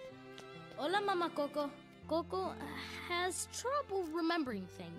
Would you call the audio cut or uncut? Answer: cut